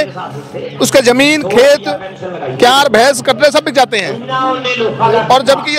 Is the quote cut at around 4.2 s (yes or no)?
no